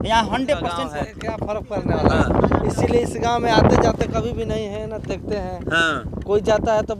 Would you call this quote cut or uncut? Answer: cut